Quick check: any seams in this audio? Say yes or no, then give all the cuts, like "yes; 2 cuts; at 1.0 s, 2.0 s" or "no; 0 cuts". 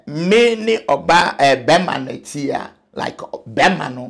no; 0 cuts